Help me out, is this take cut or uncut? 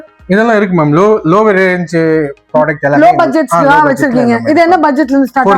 uncut